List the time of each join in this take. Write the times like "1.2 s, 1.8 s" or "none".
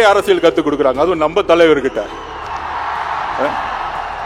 none